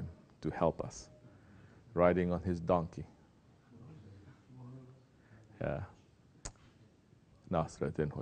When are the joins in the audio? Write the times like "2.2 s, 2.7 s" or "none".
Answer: 3.7 s